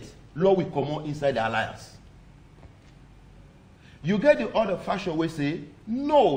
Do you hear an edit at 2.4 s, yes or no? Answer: no